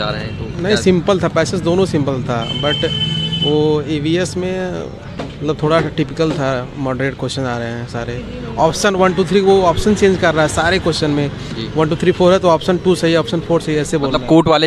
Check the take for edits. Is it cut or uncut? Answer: uncut